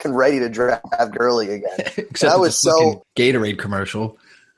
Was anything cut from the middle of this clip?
yes; 1 cut; at 3.0 s

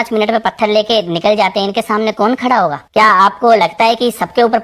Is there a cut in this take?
no; 0 cuts

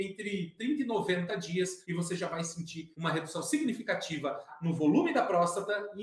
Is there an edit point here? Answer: yes; 2 cuts; at 2.8 s, 4.5 s

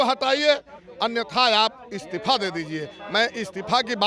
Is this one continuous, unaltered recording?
yes; 0 cuts

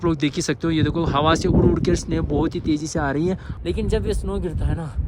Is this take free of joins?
no; 1 cut; at 3.5 s

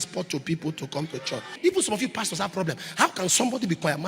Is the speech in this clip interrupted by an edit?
yes; 1 cut; at 1.5 s

